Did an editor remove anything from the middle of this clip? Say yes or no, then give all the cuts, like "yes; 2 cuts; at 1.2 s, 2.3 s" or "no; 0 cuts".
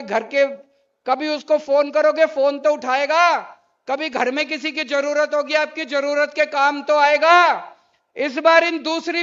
no; 0 cuts